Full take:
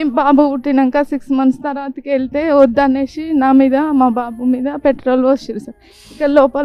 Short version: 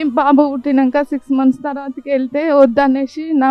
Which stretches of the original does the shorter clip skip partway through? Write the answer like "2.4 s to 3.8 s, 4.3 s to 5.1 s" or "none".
none